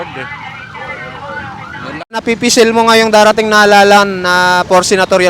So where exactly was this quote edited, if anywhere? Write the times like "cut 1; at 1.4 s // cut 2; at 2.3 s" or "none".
cut 1; at 2.2 s